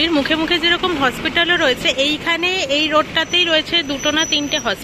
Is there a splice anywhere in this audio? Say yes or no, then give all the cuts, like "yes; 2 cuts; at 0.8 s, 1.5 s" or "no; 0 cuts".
no; 0 cuts